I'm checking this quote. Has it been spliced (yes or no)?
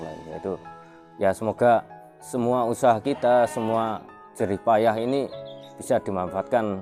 no